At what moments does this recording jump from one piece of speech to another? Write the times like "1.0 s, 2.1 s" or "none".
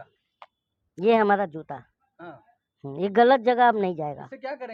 none